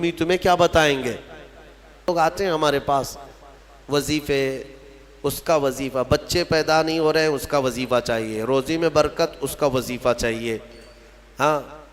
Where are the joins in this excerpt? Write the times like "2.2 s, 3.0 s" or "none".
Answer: 2.1 s